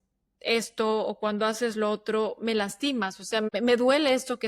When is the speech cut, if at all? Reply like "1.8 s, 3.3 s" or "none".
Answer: 3.5 s